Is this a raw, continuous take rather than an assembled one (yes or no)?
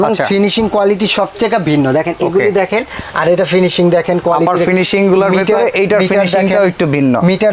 yes